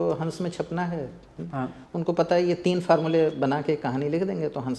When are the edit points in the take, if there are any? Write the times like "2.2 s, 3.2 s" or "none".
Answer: none